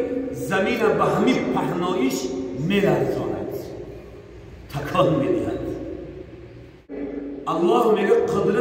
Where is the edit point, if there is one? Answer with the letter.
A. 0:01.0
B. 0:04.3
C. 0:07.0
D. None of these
C